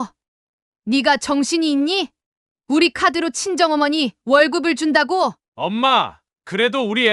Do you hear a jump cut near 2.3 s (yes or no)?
no